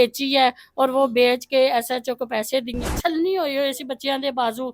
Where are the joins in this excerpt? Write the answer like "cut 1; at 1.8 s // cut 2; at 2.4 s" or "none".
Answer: cut 1; at 2.9 s